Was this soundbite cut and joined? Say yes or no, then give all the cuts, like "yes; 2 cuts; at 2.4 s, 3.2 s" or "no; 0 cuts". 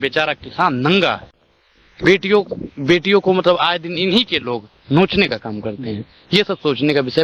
no; 0 cuts